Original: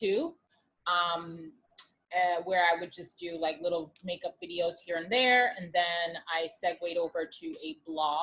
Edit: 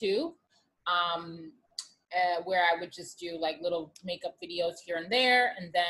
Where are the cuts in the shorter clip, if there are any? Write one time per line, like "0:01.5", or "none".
none